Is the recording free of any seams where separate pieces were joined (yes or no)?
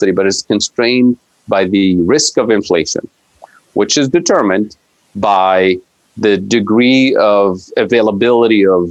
yes